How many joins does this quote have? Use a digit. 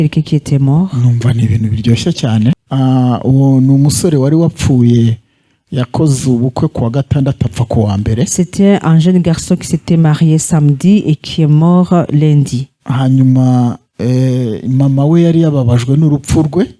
1